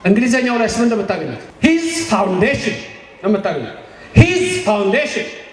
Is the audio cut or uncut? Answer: cut